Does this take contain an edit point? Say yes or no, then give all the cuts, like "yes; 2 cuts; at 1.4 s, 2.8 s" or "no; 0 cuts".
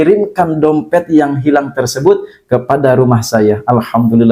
no; 0 cuts